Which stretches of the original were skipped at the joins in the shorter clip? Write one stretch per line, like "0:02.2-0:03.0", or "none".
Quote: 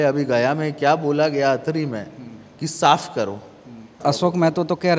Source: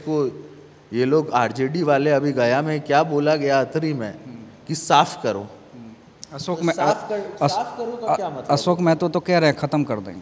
0:06.0-0:08.3